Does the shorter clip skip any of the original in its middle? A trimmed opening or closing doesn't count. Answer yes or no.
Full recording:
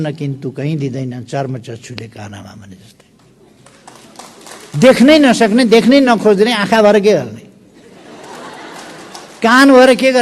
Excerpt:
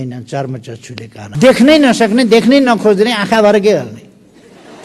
yes